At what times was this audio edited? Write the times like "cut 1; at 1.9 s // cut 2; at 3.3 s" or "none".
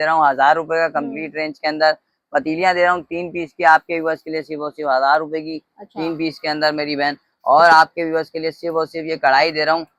none